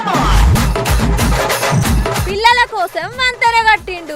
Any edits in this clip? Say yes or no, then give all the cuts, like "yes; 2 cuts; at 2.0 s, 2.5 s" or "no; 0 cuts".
yes; 1 cut; at 2.2 s